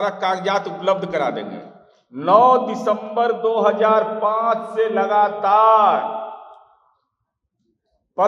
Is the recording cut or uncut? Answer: uncut